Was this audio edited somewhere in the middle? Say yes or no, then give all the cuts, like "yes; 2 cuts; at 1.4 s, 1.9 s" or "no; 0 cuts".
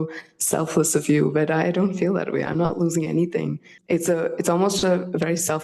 yes; 1 cut; at 3.7 s